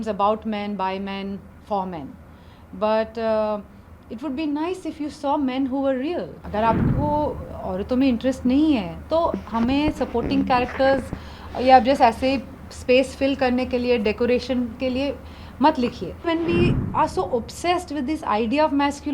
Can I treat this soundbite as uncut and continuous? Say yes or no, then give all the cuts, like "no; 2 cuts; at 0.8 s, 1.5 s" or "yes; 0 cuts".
no; 2 cuts; at 6.4 s, 16.3 s